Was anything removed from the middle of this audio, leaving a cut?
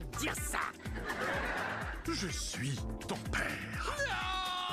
no; 0 cuts

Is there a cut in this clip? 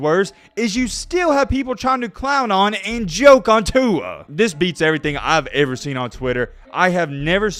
no; 0 cuts

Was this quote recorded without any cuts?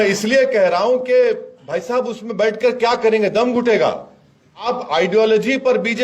no; 1 cut; at 4.6 s

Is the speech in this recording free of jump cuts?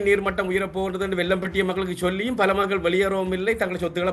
yes; 0 cuts

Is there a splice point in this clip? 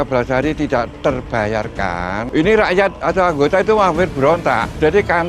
yes; 1 cut; at 2.2 s

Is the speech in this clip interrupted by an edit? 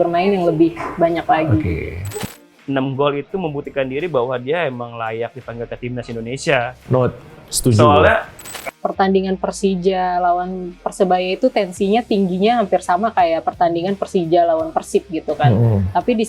yes; 2 cuts; at 2.2 s, 8.5 s

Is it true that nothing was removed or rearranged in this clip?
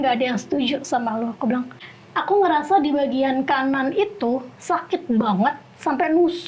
no; 1 cut; at 1.8 s

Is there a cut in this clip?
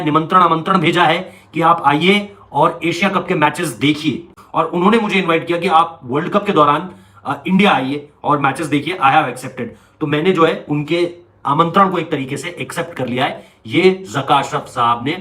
yes; 1 cut; at 4.4 s

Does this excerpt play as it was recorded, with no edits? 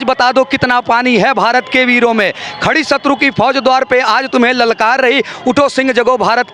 yes; 0 cuts

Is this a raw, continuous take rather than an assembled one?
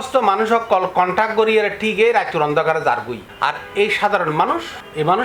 yes; 0 cuts

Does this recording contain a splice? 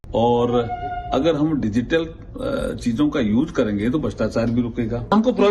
no; 0 cuts

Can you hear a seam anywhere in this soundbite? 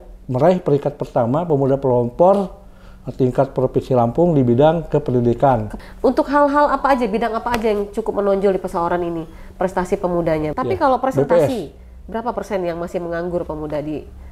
yes; 2 cuts; at 5.7 s, 10.5 s

